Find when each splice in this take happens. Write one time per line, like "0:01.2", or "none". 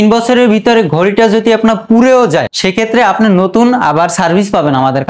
0:02.5